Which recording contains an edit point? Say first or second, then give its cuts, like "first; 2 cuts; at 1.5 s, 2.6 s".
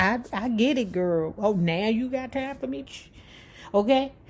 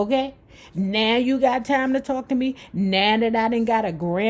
first; 1 cut; at 2.9 s